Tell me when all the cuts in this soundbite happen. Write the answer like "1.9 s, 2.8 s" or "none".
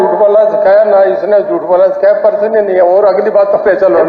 none